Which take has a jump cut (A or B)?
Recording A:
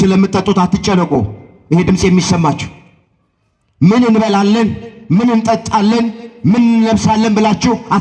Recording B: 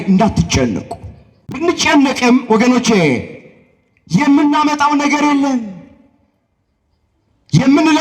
B